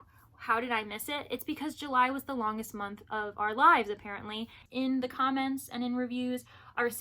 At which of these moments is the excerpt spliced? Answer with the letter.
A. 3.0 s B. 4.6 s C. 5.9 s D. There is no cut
B